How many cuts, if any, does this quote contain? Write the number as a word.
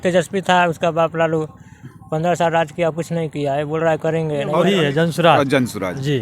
one